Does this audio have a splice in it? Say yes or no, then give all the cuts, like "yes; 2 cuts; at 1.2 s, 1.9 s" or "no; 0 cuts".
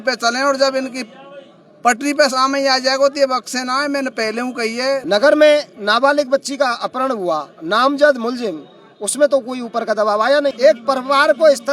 yes; 2 cuts; at 5.0 s, 10.6 s